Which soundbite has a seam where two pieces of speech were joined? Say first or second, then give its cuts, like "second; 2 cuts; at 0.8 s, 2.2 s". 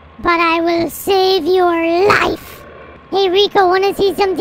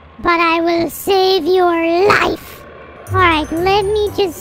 first; 1 cut; at 3.0 s